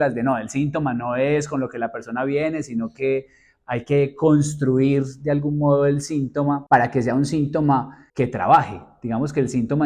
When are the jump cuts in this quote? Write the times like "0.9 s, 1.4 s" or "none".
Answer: 6.6 s, 8.0 s